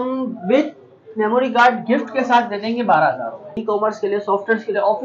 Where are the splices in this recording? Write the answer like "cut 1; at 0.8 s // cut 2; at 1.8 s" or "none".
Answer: cut 1; at 3.6 s